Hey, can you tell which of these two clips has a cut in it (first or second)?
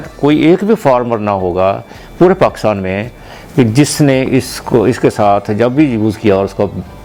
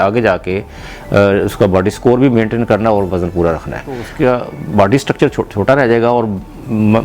second